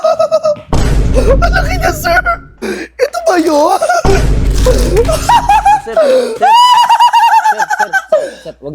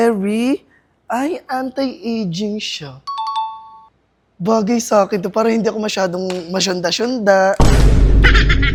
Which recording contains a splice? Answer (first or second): first